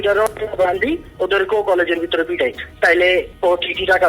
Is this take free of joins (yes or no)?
no